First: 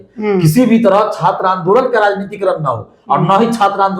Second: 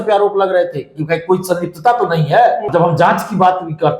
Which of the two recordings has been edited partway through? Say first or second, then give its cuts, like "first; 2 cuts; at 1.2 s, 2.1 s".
second; 1 cut; at 2.7 s